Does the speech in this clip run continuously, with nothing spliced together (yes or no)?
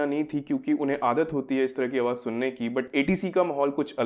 yes